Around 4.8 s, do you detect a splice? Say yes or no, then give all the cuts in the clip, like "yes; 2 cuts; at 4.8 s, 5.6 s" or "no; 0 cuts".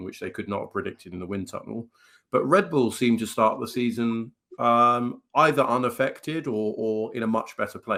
no; 0 cuts